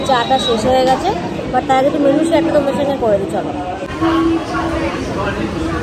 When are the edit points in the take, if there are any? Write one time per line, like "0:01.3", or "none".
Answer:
none